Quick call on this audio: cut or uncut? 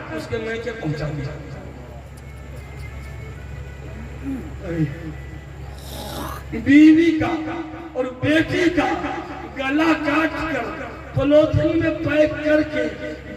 uncut